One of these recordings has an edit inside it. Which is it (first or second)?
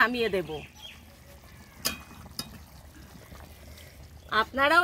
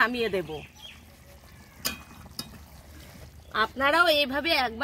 second